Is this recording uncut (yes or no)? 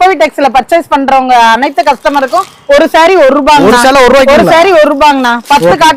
yes